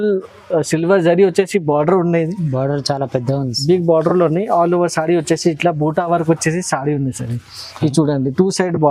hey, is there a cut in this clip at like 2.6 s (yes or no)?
no